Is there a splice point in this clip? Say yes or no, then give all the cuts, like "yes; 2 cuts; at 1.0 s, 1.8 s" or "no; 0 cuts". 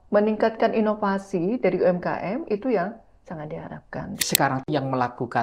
yes; 1 cut; at 4.2 s